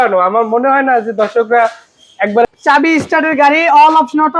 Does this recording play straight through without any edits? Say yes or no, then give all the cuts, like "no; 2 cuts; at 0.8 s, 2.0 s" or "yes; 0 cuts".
no; 1 cut; at 2.5 s